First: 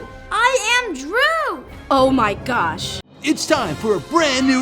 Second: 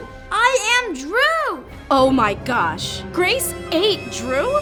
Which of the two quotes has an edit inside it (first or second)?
first